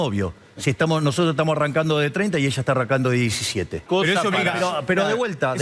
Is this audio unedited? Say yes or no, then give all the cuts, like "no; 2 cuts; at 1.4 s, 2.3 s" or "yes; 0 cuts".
no; 1 cut; at 3.8 s